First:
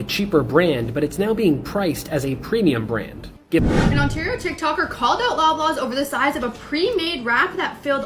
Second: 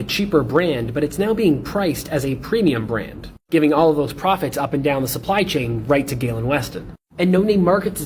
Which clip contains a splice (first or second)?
first